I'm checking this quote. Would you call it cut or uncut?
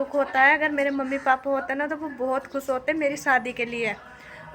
uncut